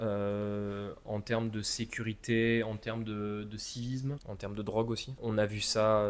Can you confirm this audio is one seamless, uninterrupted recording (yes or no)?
no